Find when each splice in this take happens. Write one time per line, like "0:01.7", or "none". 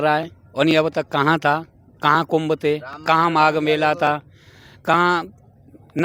none